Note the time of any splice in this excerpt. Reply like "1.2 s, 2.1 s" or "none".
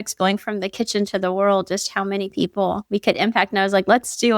2.8 s